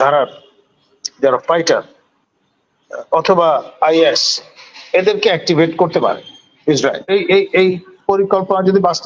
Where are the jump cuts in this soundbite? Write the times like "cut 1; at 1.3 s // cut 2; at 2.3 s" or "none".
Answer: cut 1; at 7.1 s